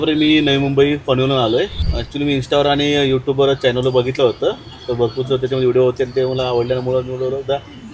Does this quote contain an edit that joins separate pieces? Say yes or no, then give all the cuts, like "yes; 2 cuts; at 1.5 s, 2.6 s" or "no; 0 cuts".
yes; 1 cut; at 1.9 s